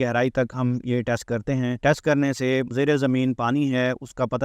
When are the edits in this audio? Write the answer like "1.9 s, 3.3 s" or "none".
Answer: 1.8 s, 2.7 s